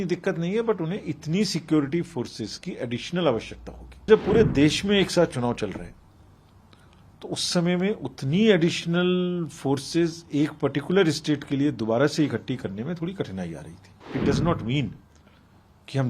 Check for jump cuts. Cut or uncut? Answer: cut